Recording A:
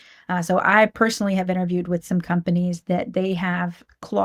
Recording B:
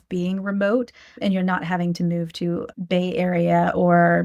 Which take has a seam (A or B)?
B